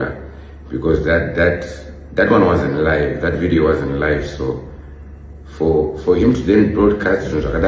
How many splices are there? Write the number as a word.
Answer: zero